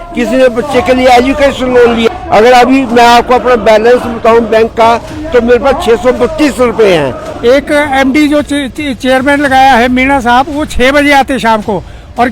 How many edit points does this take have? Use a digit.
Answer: 2